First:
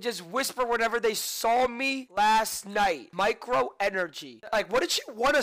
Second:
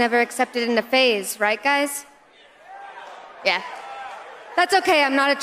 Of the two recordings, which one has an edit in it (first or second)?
first